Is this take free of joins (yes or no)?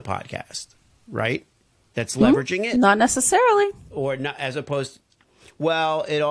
yes